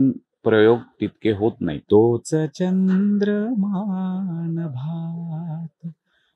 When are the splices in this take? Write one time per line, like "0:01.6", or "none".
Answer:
0:01.8